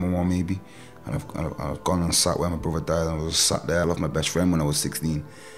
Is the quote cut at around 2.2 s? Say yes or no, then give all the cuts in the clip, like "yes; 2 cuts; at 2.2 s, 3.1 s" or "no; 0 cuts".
no; 1 cut; at 3.8 s